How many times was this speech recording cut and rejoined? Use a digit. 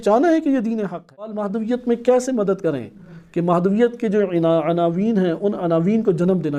1